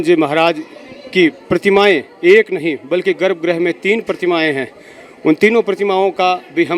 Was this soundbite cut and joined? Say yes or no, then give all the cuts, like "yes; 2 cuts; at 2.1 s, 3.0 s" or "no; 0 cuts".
no; 0 cuts